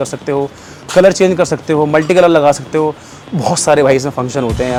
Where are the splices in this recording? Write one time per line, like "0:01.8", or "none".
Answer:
none